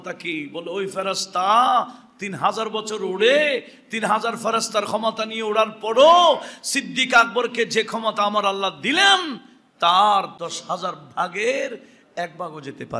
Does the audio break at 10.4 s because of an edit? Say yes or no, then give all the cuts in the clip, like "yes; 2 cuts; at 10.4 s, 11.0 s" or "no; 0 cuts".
yes; 1 cut; at 10.4 s